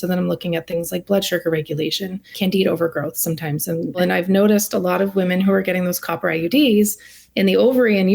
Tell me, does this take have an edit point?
yes; 2 cuts; at 2.3 s, 4.0 s

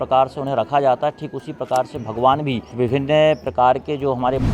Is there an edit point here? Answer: yes; 1 cut; at 2.7 s

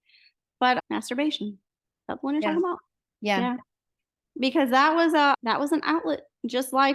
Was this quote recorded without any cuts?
yes; 0 cuts

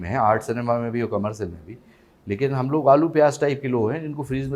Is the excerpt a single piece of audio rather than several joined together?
yes; 0 cuts

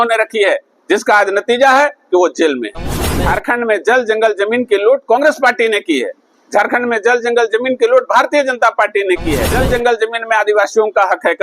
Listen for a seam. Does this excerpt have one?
yes; 2 cuts; at 3.1 s, 9.5 s

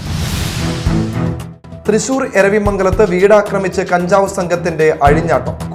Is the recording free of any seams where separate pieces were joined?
yes; 0 cuts

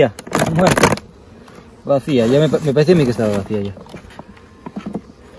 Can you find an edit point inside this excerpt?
no; 0 cuts

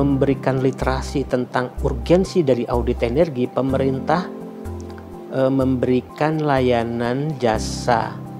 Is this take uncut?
yes; 0 cuts

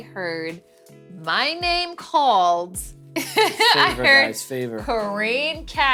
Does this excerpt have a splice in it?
no; 0 cuts

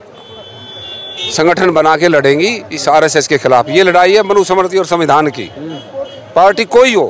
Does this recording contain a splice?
no; 0 cuts

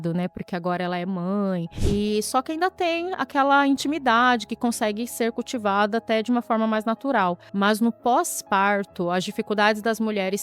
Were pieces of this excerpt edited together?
yes; 2 cuts; at 1.7 s, 7.4 s

